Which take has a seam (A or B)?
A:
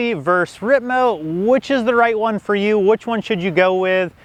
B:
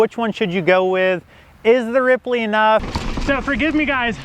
B